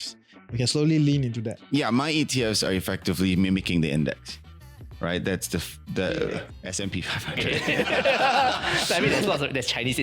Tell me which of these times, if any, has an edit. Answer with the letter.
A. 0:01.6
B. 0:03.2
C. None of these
A